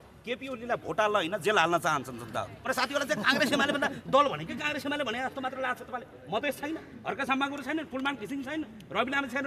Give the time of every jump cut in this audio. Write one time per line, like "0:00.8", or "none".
0:02.6